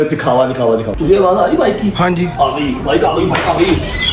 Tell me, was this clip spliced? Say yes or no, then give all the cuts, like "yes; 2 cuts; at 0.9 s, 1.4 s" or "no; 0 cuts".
yes; 1 cut; at 1.0 s